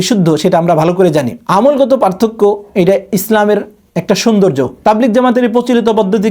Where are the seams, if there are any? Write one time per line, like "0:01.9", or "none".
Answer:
0:04.7